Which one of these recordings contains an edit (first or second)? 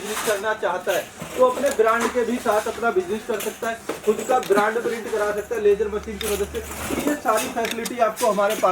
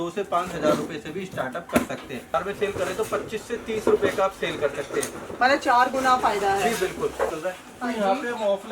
second